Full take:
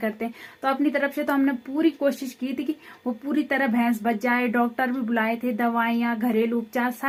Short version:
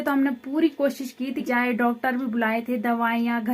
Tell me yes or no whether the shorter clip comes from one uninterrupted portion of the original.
no